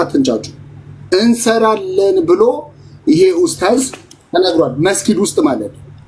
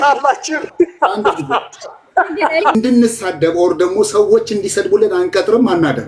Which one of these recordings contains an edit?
second; 1 cut; at 2.7 s

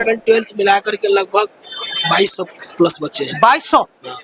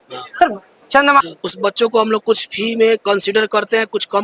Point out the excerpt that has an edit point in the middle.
second; 1 cut; at 1.2 s

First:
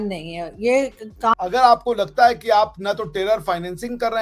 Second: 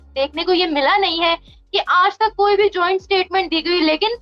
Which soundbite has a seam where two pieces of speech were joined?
first; 1 cut; at 1.4 s

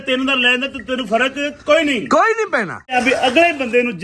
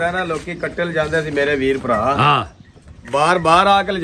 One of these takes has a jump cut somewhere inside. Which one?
first; 1 cut; at 2.9 s

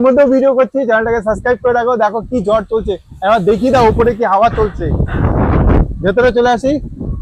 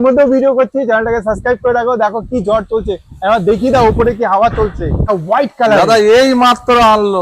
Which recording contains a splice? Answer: second; 1 cut; at 5.0 s

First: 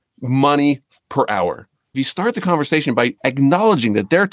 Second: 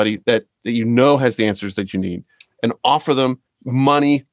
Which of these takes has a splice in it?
first; 2 cuts; at 1.9 s, 3.2 s

